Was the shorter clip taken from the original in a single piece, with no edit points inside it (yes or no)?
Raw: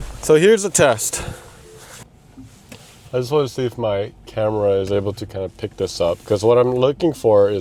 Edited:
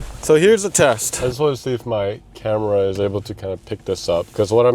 no